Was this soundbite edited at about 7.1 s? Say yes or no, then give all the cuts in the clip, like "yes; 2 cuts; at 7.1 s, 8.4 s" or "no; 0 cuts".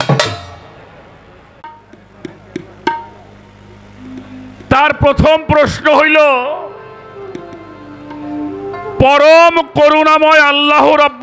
no; 1 cut; at 1.7 s